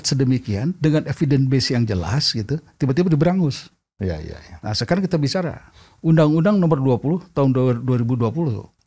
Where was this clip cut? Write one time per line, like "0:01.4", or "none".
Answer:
none